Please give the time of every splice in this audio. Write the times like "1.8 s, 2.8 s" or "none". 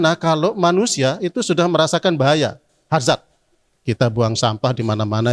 3.7 s